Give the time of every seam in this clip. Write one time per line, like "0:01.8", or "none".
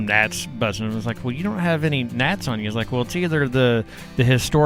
none